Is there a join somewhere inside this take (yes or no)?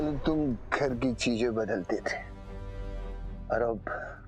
no